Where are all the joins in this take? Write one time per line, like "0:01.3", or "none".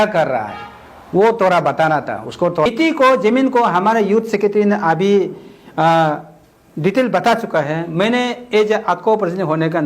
0:02.7